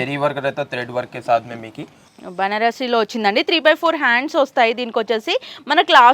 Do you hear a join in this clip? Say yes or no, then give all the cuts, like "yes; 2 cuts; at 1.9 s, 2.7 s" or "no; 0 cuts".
no; 0 cuts